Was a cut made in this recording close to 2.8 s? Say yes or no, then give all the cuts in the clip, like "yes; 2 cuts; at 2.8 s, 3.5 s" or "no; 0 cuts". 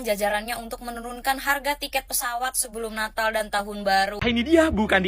no; 1 cut; at 4.2 s